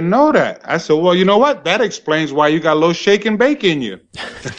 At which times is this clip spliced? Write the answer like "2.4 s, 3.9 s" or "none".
none

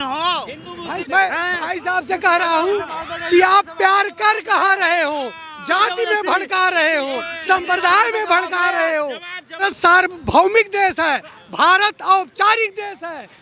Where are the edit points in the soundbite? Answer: 1.0 s, 9.6 s

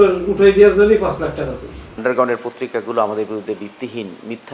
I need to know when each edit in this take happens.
2.0 s

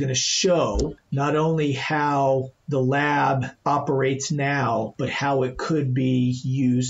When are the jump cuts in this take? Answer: 1.0 s, 2.6 s, 3.5 s

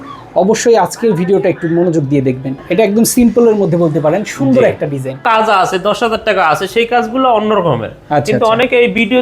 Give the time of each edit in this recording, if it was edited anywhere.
2.5 s, 5.2 s

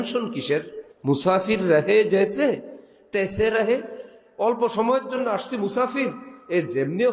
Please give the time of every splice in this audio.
none

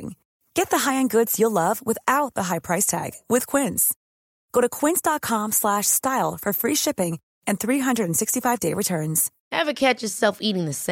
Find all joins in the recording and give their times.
none

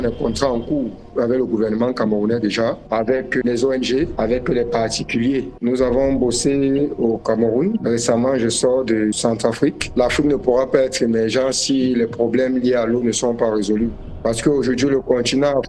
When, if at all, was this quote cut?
5.6 s, 9.8 s

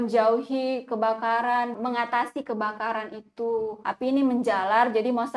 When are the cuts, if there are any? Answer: 1.7 s, 3.8 s

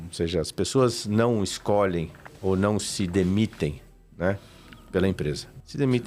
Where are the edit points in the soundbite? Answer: none

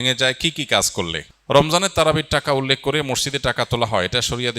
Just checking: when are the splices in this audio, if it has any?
1.3 s

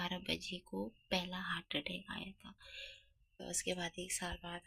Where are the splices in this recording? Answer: 3.4 s

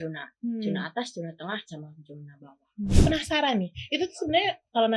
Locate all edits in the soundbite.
3.0 s

